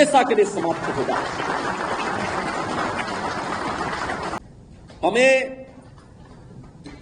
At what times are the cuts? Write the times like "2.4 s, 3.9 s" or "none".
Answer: 4.4 s

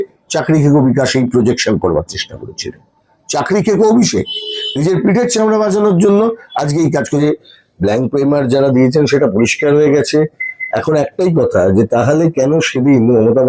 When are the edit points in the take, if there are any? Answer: 7.2 s

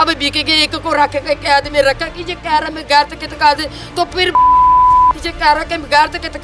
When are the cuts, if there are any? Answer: none

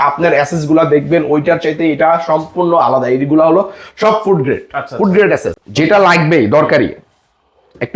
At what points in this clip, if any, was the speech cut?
5.6 s

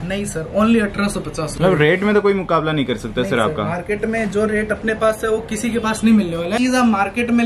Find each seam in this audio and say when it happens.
1.4 s, 6.5 s

